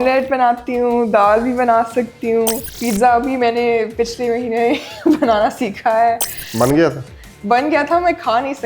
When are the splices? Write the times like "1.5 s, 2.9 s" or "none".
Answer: 2.7 s